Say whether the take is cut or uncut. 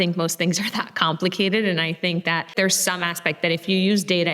cut